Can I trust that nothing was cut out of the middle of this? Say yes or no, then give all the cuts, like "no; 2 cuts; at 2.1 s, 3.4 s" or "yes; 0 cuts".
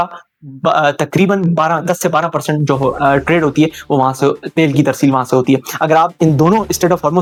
yes; 0 cuts